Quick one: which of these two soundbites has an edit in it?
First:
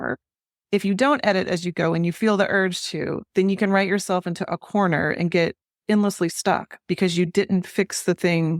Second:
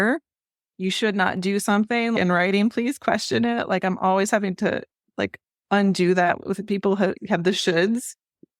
second; 2 cuts; at 2.1 s, 7.2 s

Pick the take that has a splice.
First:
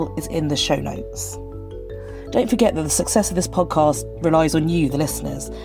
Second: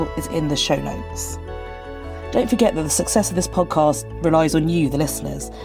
second; 2 cuts; at 1.0 s, 2.3 s

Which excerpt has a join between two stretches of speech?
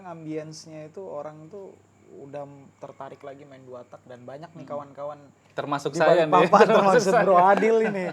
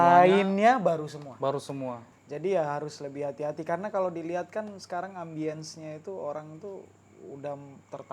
second; 1 cut; at 2.1 s

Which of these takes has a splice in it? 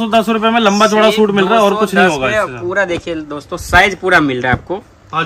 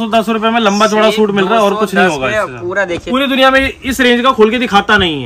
second; 1 cut; at 3.0 s

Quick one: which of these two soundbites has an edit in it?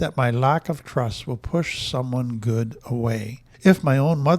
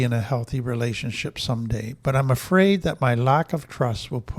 first; 1 cut; at 3.4 s

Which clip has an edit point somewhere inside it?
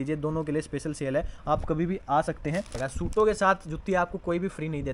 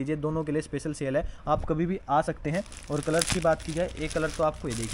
first; 1 cut; at 2.8 s

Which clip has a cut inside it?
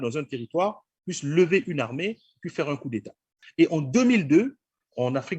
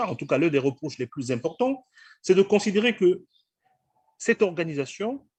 first; 1 cut; at 3.4 s

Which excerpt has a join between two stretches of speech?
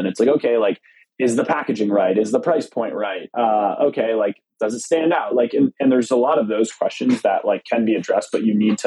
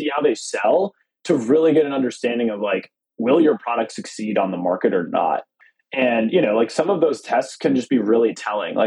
second; 1 cut; at 5.5 s

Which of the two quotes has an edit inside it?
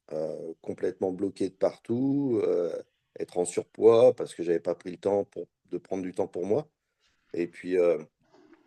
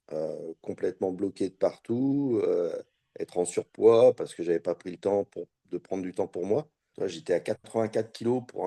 second; 1 cut; at 6.8 s

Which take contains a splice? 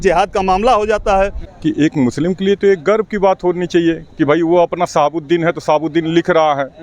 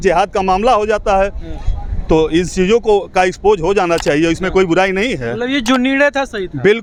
first; 1 cut; at 1.5 s

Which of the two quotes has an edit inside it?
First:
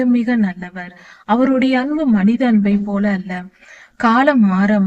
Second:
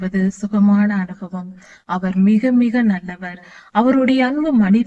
first; 1 cut; at 3.6 s

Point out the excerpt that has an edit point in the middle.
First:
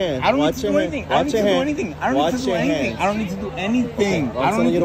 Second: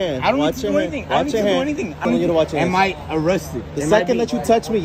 second; 1 cut; at 2.0 s

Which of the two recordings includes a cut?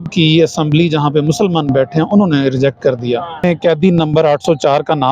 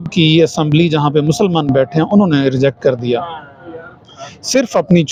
first; 1 cut; at 3.4 s

